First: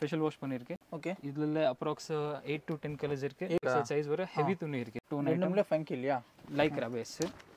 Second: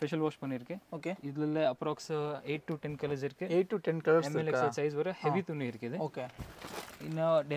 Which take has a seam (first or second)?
first